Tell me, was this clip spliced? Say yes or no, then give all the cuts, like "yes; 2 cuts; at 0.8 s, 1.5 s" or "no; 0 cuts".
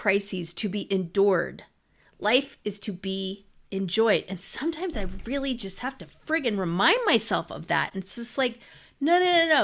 no; 0 cuts